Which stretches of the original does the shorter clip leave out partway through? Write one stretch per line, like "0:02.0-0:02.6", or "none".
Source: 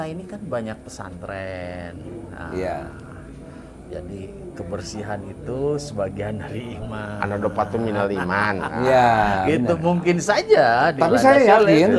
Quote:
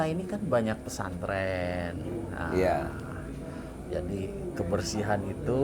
none